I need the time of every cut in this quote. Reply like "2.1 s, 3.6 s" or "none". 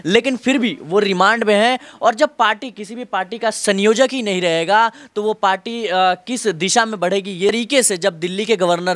7.5 s